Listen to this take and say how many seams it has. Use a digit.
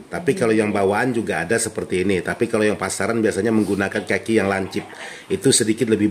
0